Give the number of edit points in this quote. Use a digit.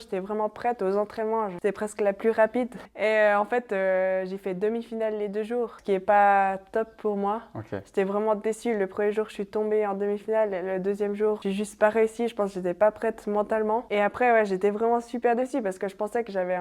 5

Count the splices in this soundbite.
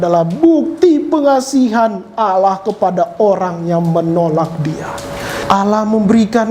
1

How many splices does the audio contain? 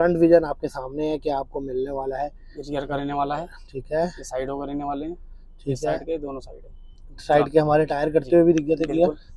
0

